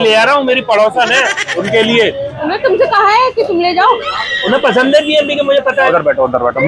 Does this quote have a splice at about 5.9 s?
yes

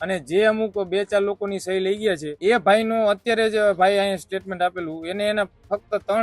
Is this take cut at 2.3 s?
yes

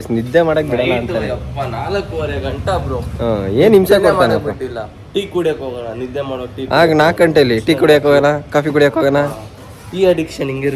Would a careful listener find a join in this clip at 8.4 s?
no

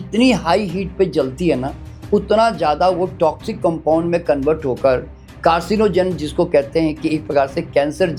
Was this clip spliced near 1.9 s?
no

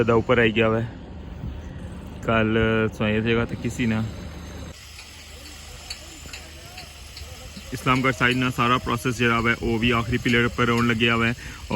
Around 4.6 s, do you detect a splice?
yes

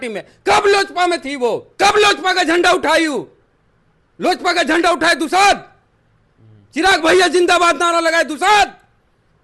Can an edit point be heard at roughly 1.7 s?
yes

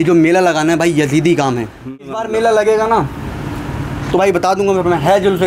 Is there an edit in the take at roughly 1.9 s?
yes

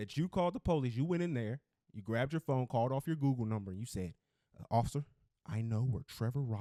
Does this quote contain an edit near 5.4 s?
no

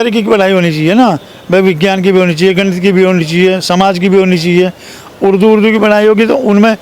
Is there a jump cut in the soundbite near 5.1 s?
yes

